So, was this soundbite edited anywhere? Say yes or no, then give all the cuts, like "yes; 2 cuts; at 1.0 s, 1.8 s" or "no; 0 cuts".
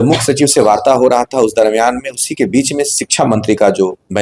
no; 0 cuts